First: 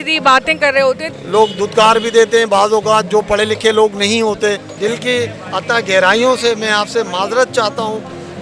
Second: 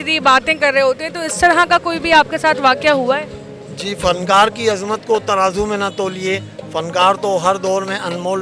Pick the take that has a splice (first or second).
first